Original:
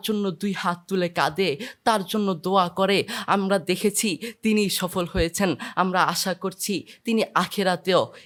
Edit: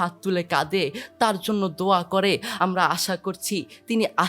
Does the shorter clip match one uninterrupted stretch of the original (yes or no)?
no